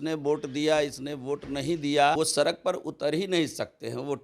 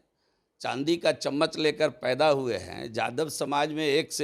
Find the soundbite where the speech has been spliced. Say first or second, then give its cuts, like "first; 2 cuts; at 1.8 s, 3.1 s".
first; 1 cut; at 2.2 s